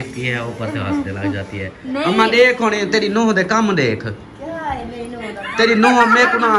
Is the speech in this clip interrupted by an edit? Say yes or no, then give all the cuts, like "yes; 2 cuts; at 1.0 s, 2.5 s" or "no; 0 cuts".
no; 0 cuts